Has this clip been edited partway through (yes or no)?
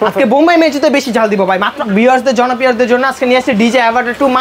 yes